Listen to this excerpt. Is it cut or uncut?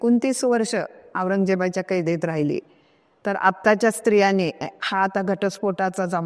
uncut